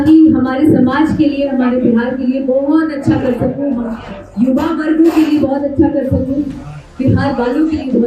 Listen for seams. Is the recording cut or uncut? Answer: uncut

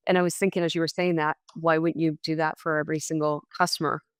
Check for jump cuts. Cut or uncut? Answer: uncut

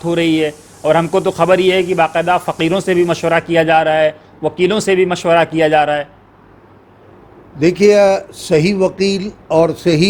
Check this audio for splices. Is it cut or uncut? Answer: uncut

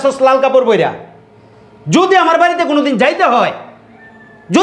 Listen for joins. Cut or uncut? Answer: uncut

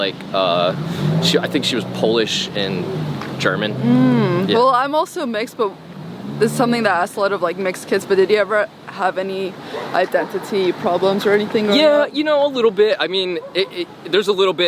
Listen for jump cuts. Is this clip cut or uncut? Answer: uncut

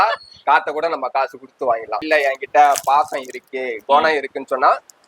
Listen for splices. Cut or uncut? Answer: cut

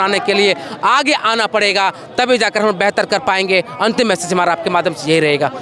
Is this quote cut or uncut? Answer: uncut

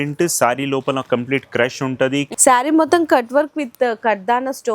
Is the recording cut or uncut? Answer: cut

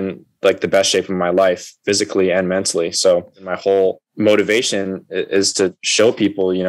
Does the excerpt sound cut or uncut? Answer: cut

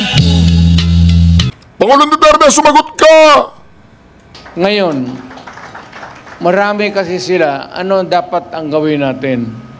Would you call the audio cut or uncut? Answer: cut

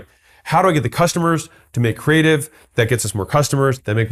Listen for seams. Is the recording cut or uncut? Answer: uncut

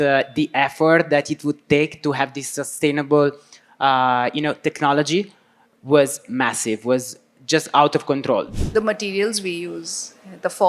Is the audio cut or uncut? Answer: cut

